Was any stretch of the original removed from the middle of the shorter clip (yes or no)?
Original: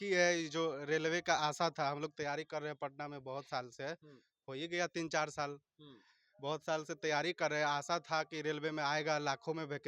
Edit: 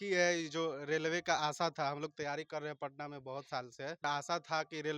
yes